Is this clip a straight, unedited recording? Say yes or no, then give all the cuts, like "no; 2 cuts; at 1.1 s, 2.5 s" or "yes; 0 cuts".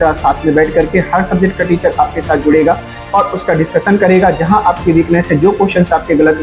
yes; 0 cuts